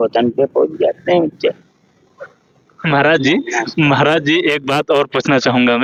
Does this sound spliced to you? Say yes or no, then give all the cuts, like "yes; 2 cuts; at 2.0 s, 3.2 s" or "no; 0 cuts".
no; 0 cuts